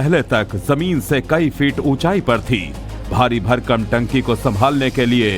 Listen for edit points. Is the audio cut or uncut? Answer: cut